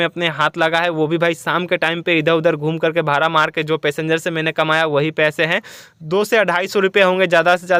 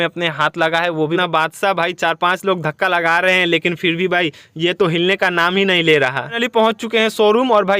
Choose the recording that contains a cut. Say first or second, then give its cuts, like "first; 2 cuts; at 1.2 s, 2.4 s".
second; 2 cuts; at 1.2 s, 6.4 s